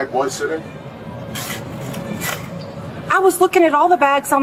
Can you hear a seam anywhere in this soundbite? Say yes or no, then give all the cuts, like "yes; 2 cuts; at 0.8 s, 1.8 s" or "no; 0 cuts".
no; 0 cuts